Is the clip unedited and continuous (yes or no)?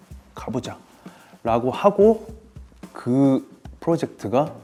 yes